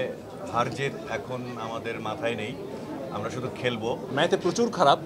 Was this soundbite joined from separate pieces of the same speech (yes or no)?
yes